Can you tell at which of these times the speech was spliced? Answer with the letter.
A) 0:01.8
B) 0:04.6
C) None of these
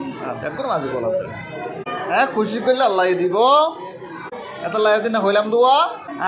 A